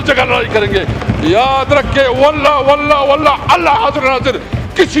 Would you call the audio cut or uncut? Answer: uncut